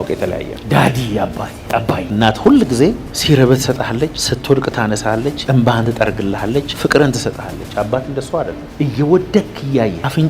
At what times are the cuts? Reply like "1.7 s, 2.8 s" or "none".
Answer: 2.0 s, 3.1 s, 4.3 s, 5.4 s, 6.7 s